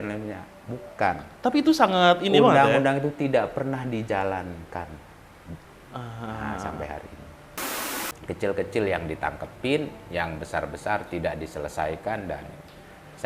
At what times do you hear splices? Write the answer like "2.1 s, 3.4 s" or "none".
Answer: 7.6 s